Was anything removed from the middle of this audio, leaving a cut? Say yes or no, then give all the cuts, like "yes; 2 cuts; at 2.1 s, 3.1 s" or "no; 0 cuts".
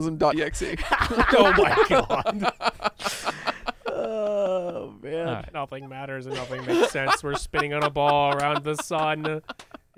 no; 0 cuts